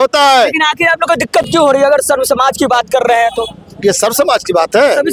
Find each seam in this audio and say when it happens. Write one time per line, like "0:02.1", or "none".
none